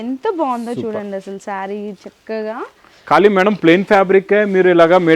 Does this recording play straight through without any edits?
yes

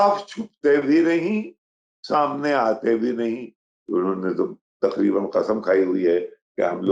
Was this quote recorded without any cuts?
no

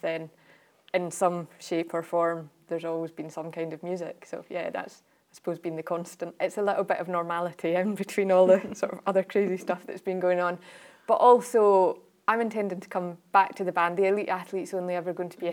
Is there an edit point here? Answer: yes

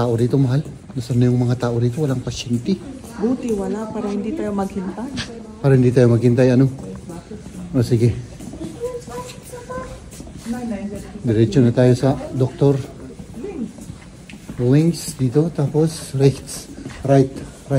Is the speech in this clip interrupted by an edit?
no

